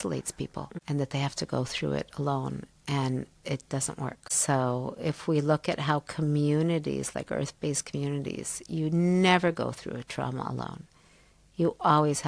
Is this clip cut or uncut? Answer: uncut